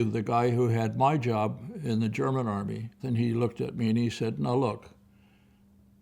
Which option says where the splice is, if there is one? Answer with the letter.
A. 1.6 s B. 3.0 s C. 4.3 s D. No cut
B